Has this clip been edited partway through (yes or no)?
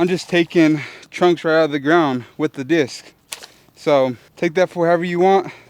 yes